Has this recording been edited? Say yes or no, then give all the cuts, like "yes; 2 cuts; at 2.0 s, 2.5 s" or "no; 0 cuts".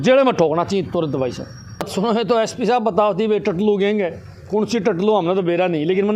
yes; 1 cut; at 1.9 s